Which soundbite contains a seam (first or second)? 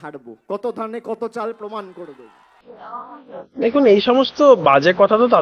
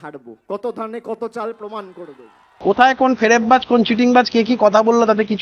second